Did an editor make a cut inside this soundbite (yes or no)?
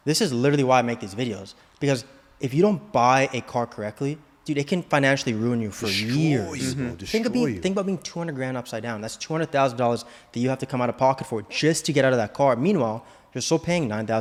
no